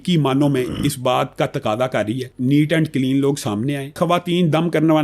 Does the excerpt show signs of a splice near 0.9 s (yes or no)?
no